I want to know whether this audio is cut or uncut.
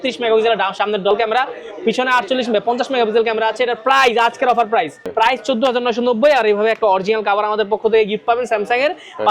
cut